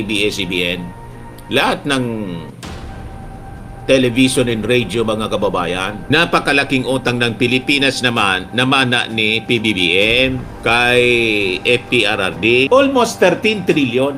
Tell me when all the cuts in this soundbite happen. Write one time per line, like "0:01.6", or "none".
0:05.9